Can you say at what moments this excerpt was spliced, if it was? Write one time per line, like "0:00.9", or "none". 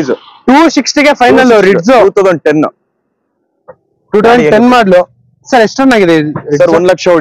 none